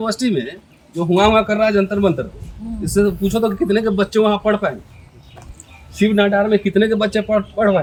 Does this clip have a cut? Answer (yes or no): no